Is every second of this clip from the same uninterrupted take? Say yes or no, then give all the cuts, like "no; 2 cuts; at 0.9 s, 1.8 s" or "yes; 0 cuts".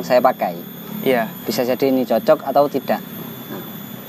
yes; 0 cuts